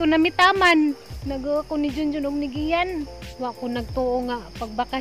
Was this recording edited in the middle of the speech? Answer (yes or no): yes